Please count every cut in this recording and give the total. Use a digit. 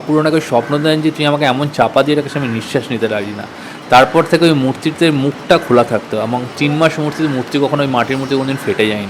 0